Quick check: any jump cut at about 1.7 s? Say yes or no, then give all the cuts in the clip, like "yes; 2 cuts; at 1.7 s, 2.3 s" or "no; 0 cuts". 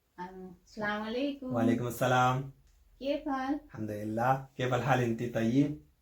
no; 0 cuts